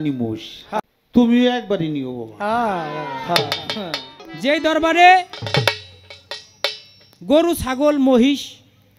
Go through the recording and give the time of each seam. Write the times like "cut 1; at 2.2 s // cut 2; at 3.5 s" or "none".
cut 1; at 0.8 s // cut 2; at 4.2 s